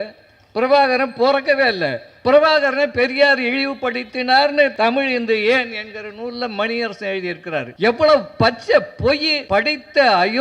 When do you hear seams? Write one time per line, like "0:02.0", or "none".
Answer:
0:04.7
0:07.7
0:09.3